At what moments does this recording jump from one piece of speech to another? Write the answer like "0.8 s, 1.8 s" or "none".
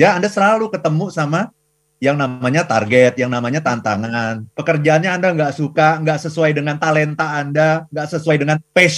4.5 s